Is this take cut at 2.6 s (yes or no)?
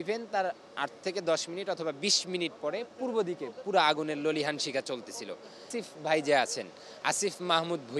no